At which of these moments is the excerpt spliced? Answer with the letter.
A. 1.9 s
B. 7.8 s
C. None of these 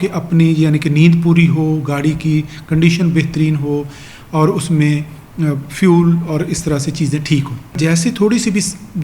B